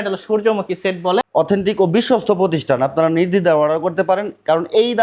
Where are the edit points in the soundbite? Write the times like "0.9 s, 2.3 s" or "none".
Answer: 1.3 s